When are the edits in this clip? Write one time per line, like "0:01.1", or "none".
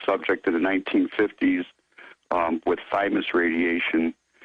0:00.9